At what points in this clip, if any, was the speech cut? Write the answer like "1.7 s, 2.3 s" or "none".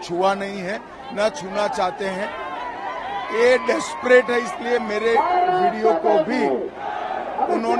none